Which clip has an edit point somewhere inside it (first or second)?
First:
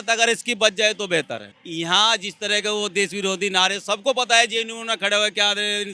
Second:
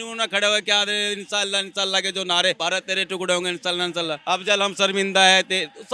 second